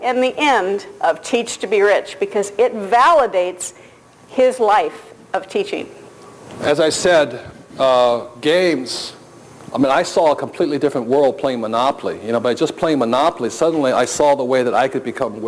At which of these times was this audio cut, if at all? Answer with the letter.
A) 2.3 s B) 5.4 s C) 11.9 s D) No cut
D